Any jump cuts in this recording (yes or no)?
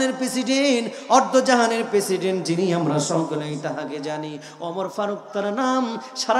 no